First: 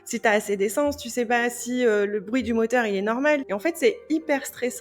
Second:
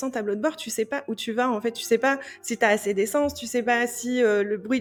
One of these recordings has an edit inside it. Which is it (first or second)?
first